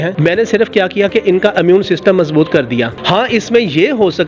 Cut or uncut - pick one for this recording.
uncut